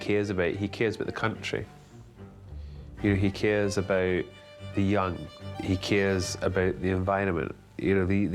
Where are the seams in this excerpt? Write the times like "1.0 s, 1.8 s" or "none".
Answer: 5.5 s